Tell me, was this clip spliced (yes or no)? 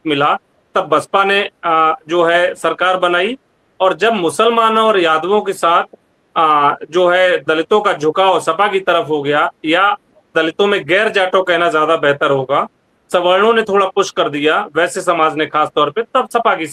no